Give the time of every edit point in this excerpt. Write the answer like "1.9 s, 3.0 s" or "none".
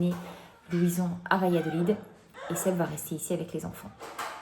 2.3 s